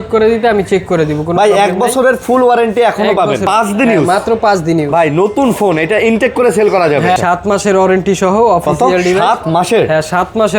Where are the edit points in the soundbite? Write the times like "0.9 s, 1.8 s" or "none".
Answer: 3.4 s, 7.2 s